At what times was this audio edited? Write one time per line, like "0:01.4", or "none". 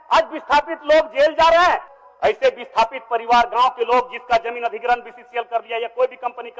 0:01.9